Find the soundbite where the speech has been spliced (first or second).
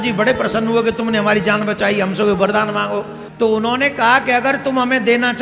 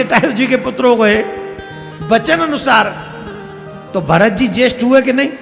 first